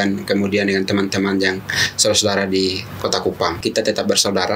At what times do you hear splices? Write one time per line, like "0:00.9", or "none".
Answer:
0:03.6